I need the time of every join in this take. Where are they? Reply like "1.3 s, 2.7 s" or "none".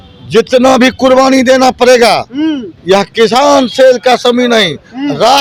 none